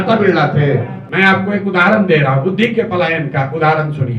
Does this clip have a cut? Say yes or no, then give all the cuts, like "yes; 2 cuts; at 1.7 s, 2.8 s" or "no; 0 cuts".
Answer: yes; 1 cut; at 1.0 s